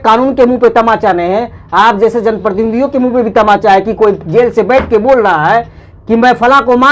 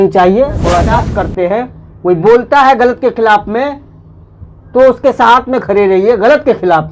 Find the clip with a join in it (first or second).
second